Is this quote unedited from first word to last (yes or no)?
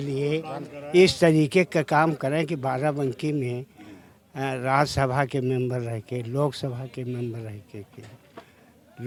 yes